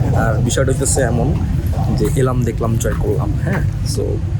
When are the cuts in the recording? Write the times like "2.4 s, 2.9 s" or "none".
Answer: none